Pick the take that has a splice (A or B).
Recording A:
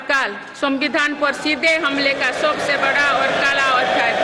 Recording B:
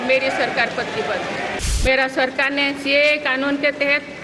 B